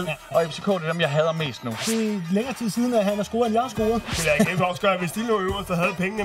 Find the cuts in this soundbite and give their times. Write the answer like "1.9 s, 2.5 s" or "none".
1.8 s, 4.1 s